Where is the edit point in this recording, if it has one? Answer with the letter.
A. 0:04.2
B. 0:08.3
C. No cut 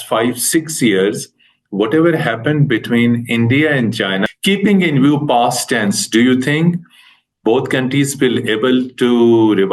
A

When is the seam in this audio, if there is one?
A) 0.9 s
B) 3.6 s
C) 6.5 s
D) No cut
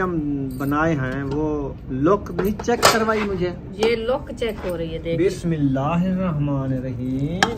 B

